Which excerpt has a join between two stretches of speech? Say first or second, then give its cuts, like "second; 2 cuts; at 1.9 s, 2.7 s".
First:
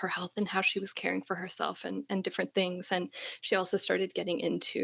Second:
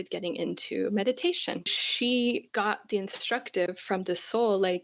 second; 2 cuts; at 1.8 s, 2.5 s